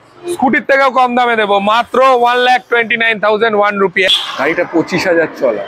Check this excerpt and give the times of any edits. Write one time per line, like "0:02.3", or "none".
0:04.1